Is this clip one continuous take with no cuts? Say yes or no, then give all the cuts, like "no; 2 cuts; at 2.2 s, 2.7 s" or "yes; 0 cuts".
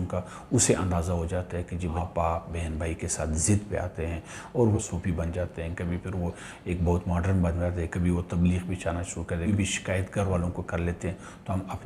no; 3 cuts; at 2.0 s, 4.8 s, 9.5 s